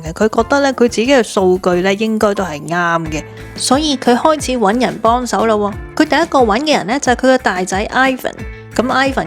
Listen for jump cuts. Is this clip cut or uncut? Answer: cut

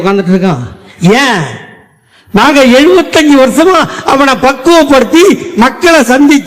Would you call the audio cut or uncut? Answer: uncut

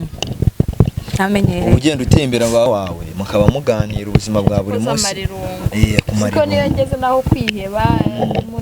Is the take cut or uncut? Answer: cut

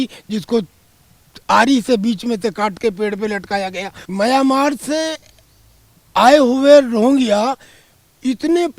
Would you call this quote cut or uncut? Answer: cut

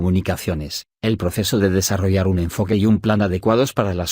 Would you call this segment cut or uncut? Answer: cut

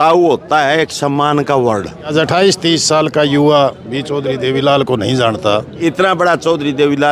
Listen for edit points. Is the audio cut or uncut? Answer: cut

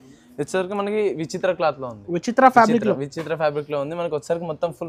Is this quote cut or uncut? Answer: uncut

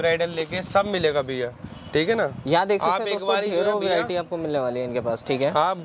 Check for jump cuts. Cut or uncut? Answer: uncut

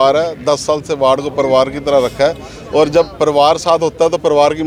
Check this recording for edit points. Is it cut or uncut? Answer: uncut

